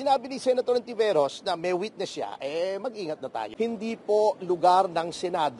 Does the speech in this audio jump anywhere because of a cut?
yes; 1 cut; at 3.4 s

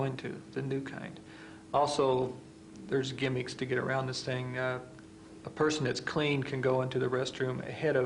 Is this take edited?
no; 0 cuts

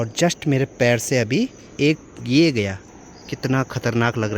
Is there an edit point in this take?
yes; 1 cut; at 2.8 s

